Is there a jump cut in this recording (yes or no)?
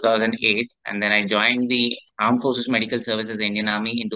yes